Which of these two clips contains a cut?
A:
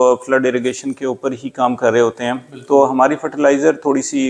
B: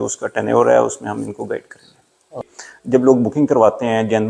B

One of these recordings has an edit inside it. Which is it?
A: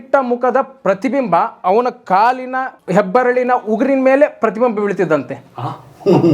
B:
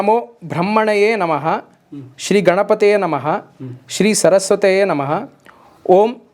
A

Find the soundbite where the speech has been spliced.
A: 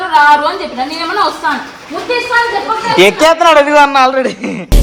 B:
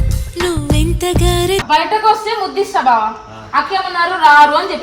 B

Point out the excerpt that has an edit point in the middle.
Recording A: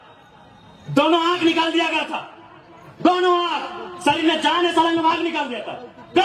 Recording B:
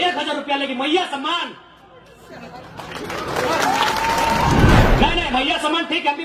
B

